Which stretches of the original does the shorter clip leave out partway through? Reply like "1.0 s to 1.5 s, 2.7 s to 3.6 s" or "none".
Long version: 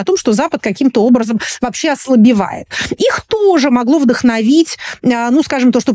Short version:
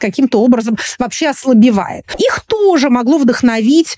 2.6 s to 2.8 s